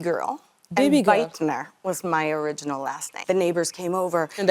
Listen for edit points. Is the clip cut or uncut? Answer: cut